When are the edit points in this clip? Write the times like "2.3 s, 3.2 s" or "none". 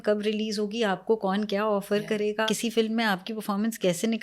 2.5 s